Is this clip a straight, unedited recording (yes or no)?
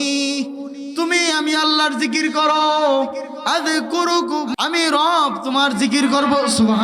no